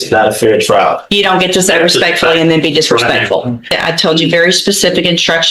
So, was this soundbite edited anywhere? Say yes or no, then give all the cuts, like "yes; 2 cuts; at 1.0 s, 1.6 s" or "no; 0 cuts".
yes; 1 cut; at 3.8 s